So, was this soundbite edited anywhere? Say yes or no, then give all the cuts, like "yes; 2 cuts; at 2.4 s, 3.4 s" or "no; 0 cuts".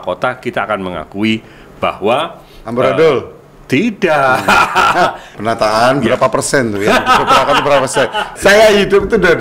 yes; 2 cuts; at 5.3 s, 8.3 s